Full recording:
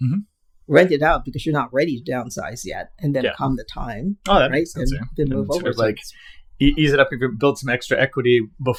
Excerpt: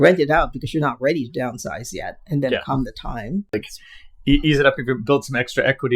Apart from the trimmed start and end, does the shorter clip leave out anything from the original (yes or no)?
yes